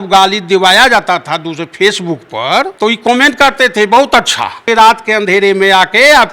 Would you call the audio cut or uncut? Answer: cut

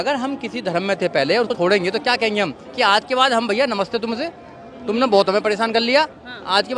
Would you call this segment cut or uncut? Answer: cut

